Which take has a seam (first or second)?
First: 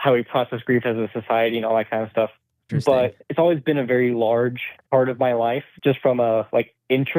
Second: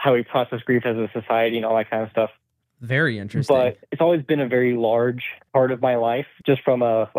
first